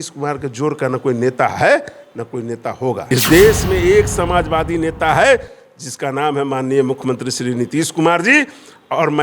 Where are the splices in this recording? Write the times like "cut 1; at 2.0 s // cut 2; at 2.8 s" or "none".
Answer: cut 1; at 3.1 s